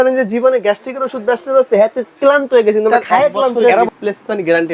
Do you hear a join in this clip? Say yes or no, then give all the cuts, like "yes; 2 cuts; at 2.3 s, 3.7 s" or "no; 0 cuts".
yes; 1 cut; at 3.6 s